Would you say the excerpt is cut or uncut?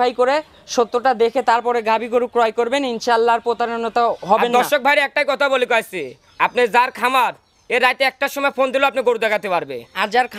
uncut